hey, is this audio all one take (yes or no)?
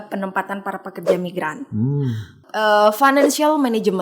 no